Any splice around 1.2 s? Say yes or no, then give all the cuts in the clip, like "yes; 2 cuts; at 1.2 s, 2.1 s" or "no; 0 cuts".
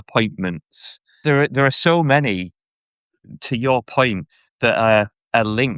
yes; 1 cut; at 1.2 s